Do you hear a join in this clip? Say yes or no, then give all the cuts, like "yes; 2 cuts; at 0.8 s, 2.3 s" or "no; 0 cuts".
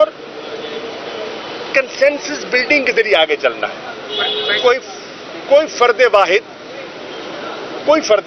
no; 0 cuts